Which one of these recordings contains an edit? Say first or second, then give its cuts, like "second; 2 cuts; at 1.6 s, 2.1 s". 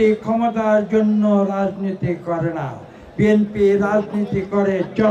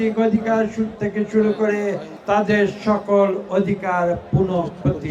second; 1 cut; at 2.1 s